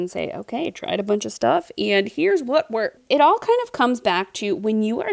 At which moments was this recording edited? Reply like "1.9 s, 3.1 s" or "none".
3.0 s